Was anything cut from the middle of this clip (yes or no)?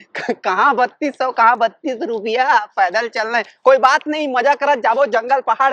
no